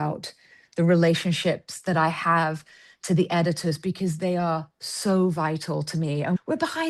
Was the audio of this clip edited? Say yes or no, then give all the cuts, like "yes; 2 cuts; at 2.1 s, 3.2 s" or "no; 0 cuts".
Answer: no; 0 cuts